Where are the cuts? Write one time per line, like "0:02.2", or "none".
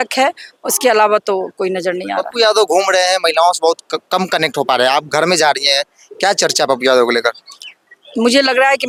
none

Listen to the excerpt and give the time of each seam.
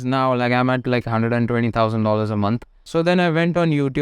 0:02.8

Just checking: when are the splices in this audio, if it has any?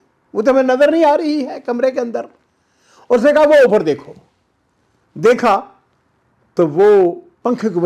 none

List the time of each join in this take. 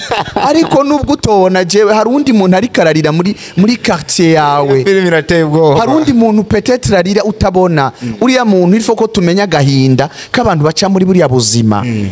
none

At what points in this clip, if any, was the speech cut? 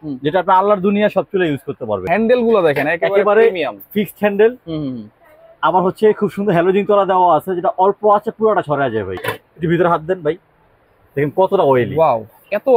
0:02.0
0:09.2

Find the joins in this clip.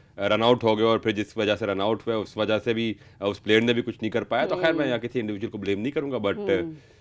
none

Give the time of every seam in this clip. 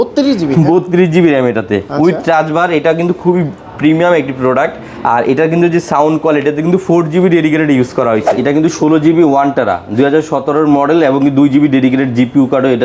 0:08.3

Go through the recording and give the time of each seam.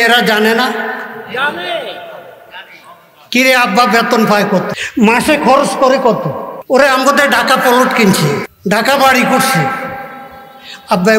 0:04.8
0:06.5
0:08.5

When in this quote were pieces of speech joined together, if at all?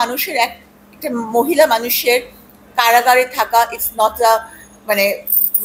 none

